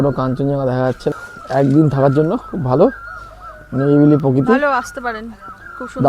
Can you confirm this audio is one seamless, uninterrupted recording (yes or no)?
no